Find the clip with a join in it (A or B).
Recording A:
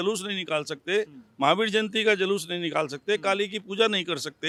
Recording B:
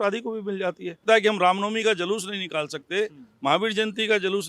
B